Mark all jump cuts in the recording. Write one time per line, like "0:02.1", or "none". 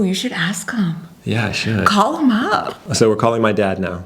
0:02.8